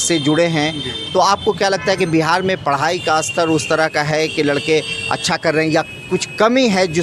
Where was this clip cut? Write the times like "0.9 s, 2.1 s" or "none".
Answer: none